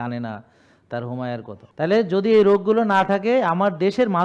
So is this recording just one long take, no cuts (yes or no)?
no